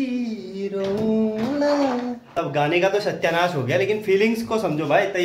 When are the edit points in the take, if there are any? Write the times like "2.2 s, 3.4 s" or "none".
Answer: 2.3 s